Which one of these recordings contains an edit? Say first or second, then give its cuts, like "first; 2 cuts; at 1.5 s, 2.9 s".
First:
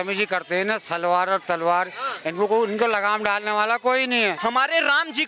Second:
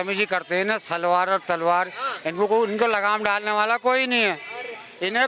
first; 1 cut; at 4.4 s